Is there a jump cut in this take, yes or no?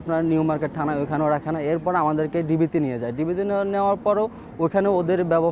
no